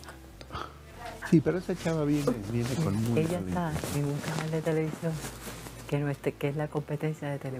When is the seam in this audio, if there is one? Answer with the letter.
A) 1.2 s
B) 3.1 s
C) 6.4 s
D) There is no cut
A